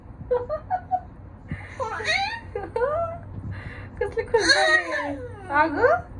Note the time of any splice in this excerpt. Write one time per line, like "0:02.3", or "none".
none